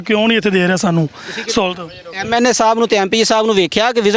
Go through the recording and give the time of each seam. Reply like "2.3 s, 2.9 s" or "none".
none